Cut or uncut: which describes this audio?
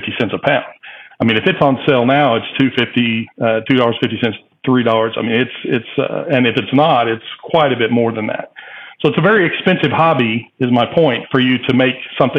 uncut